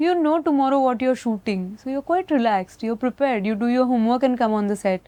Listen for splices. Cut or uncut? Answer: uncut